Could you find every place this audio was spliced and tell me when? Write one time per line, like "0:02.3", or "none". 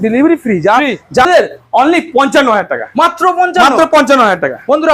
0:01.2